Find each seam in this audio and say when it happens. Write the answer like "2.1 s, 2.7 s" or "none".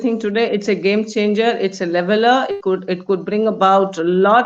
none